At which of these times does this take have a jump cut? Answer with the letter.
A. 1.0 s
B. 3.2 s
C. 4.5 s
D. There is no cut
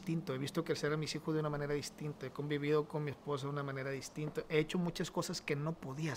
D